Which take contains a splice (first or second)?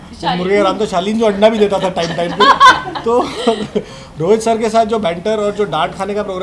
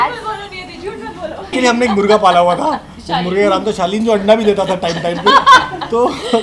second